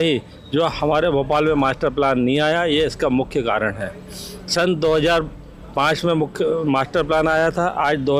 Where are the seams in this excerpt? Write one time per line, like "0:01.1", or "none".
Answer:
none